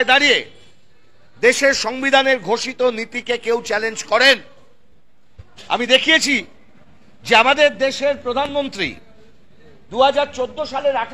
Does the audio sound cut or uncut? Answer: uncut